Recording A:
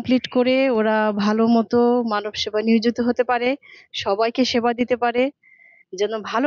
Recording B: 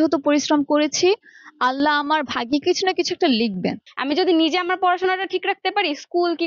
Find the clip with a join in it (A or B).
B